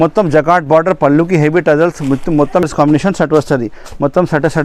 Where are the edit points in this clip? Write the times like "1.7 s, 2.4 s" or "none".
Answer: 2.6 s